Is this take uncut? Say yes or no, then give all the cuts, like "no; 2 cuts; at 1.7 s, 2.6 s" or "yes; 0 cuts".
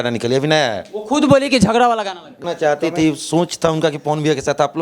no; 1 cut; at 2.4 s